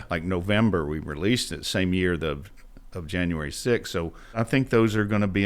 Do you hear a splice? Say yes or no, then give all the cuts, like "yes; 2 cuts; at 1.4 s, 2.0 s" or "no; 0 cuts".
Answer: yes; 1 cut; at 4.4 s